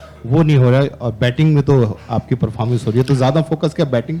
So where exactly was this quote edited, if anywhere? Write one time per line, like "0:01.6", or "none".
none